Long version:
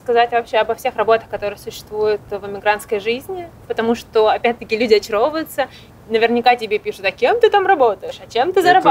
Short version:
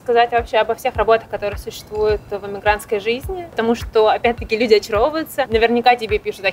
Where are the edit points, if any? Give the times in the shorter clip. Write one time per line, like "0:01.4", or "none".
0:03.5
0:05.4